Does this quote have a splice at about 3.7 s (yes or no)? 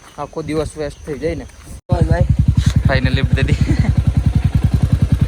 no